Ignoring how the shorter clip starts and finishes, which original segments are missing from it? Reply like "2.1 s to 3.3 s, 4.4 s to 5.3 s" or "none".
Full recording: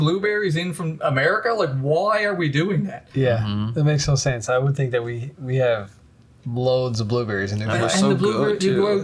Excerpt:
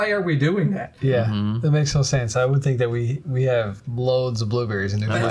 6.0 s to 6.4 s